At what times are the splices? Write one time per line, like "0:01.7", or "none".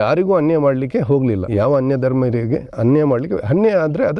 0:01.4